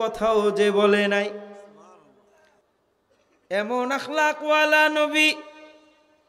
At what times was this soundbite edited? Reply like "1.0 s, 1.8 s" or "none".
2.7 s